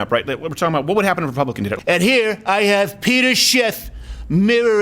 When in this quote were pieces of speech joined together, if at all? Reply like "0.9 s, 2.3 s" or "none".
1.8 s